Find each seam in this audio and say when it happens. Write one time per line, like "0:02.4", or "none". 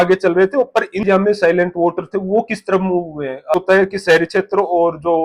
0:01.0
0:03.6